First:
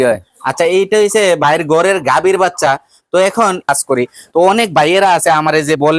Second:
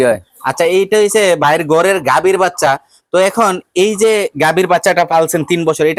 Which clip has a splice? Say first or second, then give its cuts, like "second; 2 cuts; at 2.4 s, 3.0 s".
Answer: first; 1 cut; at 3.7 s